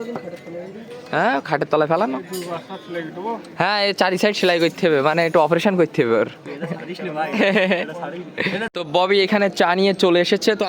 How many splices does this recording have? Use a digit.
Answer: 1